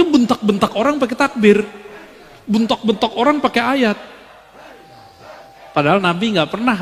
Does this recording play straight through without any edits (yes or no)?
yes